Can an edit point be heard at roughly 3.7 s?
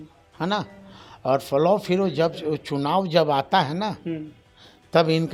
no; 0 cuts

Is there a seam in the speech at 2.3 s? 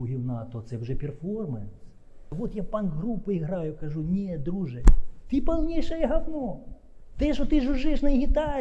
yes; 1 cut; at 2.3 s

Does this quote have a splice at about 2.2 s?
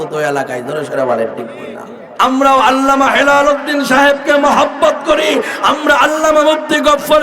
yes; 1 cut; at 2.2 s

